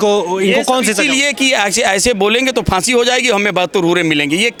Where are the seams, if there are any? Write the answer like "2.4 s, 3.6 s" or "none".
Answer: none